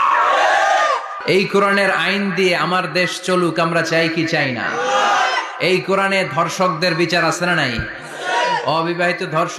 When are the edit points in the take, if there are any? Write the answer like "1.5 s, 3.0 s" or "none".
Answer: 1.2 s

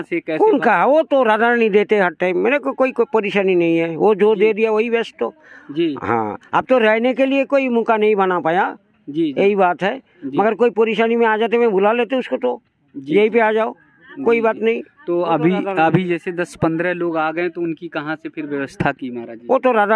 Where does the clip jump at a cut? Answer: none

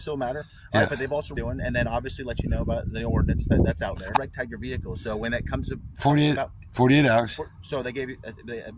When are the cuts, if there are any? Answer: 1.3 s, 4.2 s

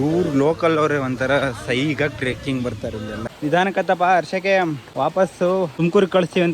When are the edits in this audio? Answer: 3.3 s, 4.8 s, 5.7 s

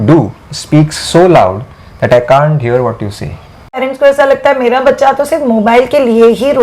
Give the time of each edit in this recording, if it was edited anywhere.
3.8 s

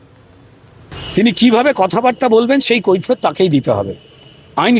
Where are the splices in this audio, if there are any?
1.0 s

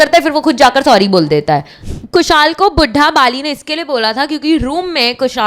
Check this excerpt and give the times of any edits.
1.8 s

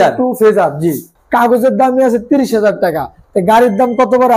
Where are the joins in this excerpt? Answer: 1.1 s

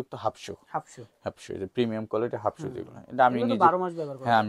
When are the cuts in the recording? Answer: none

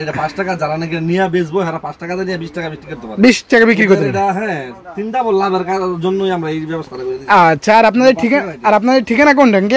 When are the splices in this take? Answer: none

